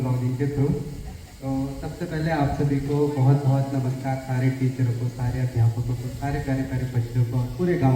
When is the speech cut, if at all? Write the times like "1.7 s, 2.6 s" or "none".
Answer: none